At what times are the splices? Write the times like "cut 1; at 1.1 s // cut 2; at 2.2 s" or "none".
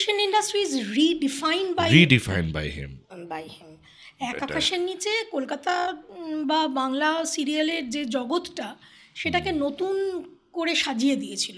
none